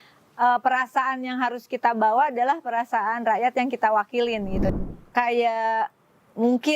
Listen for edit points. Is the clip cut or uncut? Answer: cut